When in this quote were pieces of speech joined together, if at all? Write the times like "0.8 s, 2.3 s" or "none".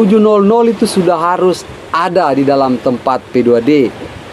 none